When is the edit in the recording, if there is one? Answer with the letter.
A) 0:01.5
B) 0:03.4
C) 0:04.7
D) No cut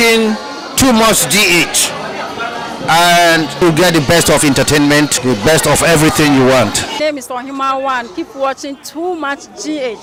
D